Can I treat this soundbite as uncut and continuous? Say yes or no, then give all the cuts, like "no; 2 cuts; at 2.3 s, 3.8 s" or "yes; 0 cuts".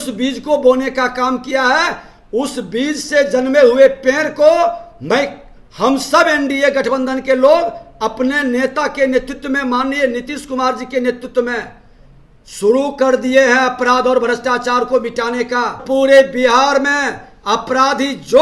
no; 1 cut; at 15.8 s